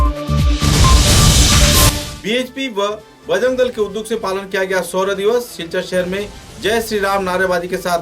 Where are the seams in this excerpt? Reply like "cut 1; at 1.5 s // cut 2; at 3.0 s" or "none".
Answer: cut 1; at 2.0 s